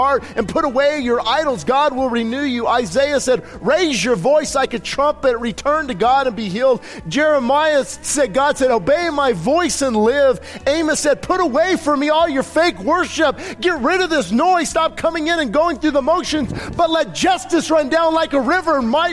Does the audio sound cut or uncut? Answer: uncut